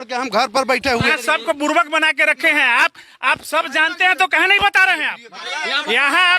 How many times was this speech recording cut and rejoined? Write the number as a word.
two